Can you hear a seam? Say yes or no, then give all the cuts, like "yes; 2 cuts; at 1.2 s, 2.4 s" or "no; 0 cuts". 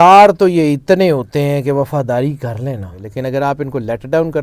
yes; 1 cut; at 3.0 s